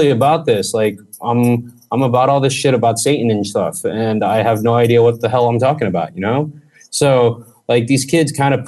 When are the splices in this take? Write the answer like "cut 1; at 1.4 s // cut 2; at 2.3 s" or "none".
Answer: none